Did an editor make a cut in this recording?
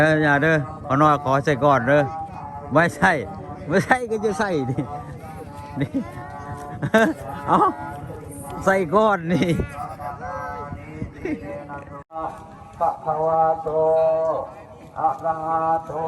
yes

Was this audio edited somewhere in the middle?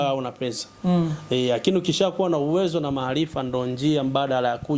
no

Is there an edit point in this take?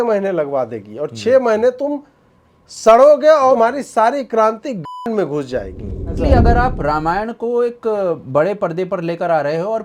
yes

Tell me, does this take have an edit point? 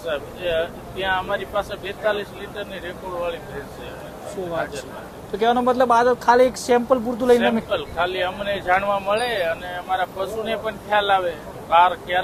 no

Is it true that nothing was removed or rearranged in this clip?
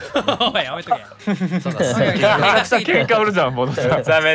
yes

